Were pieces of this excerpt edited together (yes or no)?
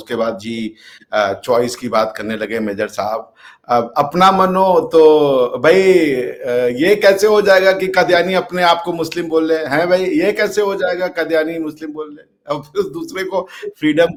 no